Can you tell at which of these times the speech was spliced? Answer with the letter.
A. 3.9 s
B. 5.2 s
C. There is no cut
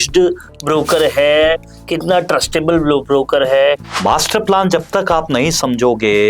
A